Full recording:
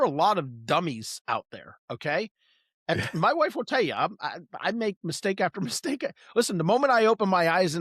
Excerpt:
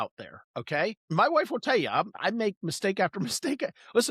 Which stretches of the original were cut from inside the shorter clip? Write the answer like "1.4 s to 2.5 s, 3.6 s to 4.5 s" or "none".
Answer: 2.4 s to 3.1 s, 4.2 s to 4.5 s